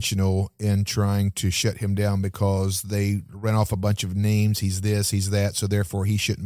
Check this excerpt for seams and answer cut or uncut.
uncut